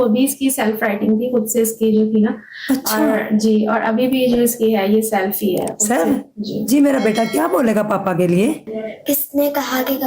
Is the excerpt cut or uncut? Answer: cut